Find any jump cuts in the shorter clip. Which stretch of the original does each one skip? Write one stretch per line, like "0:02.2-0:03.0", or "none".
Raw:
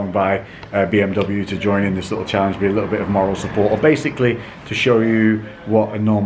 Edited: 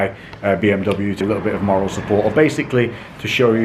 0:01.5-0:02.7